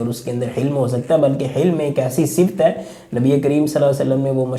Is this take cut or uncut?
uncut